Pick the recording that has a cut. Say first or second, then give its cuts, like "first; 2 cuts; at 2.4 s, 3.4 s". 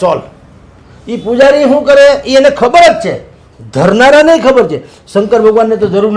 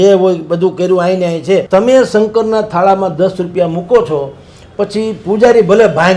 second; 1 cut; at 1.7 s